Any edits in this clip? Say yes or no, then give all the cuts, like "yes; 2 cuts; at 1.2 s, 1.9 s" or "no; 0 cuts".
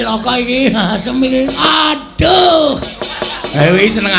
yes; 1 cut; at 1.7 s